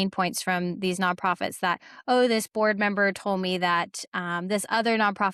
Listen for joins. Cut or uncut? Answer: uncut